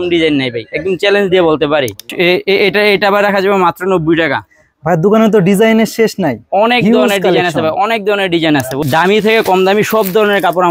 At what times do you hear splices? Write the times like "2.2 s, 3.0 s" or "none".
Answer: 2.1 s, 8.7 s